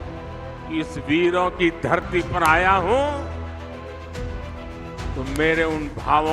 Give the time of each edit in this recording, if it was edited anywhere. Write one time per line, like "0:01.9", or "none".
0:03.2
0:05.1